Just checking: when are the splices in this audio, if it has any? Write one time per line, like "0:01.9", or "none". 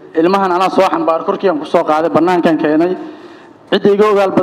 none